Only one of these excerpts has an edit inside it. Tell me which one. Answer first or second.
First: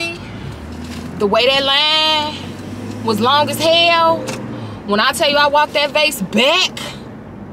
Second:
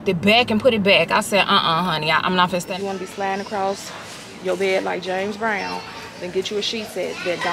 second